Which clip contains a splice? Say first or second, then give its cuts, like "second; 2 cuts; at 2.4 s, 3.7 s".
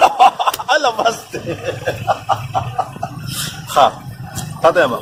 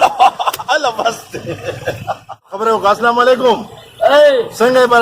second; 1 cut; at 2.5 s